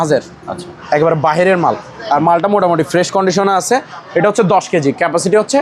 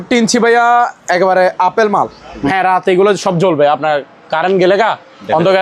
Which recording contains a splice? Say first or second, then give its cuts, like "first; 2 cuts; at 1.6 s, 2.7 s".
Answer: second; 1 cut; at 2.5 s